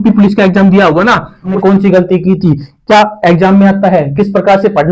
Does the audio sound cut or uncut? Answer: cut